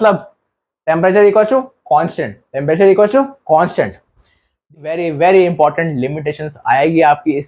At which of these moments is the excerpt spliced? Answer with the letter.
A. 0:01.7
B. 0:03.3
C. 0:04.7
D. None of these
C